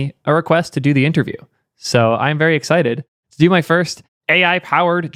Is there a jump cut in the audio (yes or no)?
no